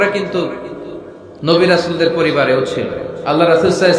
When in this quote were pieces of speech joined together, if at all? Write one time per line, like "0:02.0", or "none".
none